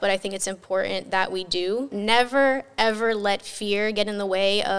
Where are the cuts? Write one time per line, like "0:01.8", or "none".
0:01.9